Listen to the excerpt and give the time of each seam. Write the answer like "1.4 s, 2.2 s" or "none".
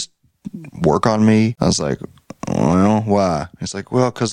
1.5 s